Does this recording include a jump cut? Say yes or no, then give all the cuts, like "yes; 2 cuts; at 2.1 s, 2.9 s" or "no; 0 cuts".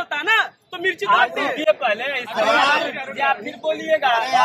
no; 0 cuts